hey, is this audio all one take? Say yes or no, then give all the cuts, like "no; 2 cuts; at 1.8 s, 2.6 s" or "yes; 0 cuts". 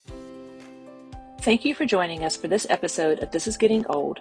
no; 1 cut; at 1.4 s